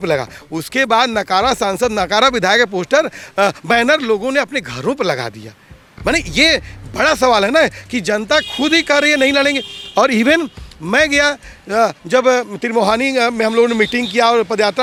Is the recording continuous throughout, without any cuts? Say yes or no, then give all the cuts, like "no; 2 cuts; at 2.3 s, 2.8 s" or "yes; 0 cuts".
yes; 0 cuts